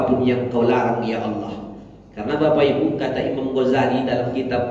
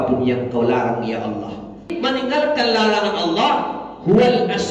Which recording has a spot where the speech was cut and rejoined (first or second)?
second